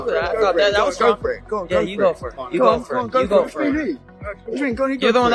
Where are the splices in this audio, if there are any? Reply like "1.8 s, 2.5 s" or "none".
0.9 s